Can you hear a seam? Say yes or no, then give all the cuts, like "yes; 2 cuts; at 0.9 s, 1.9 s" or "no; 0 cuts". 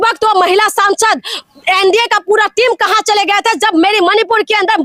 no; 0 cuts